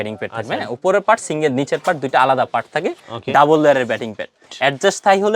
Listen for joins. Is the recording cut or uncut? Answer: cut